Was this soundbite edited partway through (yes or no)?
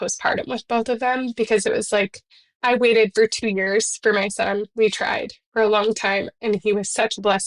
no